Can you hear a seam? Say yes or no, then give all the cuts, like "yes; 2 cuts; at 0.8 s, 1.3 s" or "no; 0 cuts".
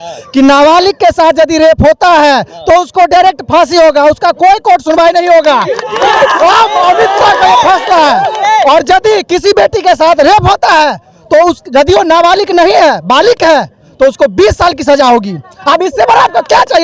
no; 0 cuts